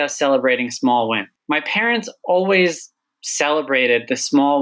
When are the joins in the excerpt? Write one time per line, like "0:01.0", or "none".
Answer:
0:01.3